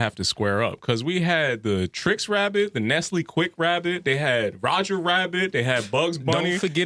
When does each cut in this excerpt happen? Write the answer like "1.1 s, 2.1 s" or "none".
none

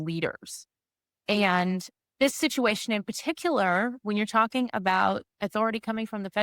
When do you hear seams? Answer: 5.3 s

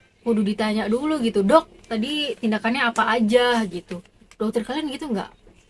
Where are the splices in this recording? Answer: none

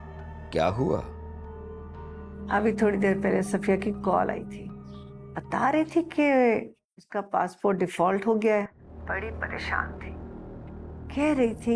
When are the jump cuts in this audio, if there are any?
none

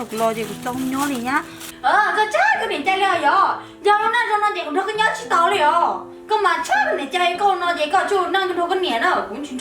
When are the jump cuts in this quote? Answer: 1.6 s

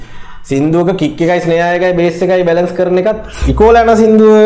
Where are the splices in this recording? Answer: 3.4 s

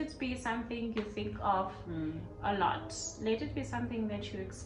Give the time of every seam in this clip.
none

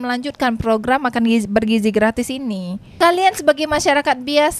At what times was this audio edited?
none

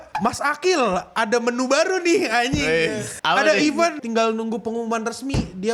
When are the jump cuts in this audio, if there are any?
3.1 s, 4.0 s

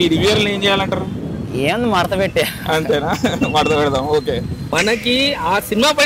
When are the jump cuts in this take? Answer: 4.7 s

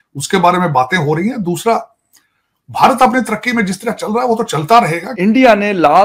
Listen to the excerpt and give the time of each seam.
5.1 s

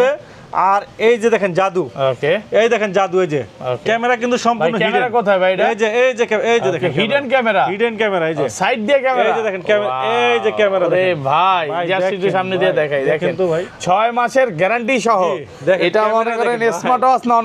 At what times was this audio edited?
none

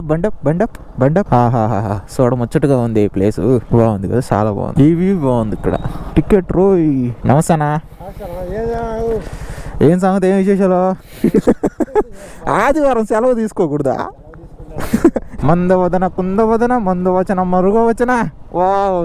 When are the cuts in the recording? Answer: 1.3 s, 6.0 s, 7.2 s, 15.3 s

